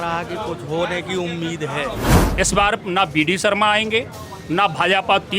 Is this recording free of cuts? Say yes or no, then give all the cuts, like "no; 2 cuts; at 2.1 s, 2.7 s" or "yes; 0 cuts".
no; 1 cut; at 2.2 s